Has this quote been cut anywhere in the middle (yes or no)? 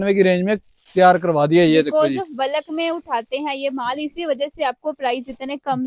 no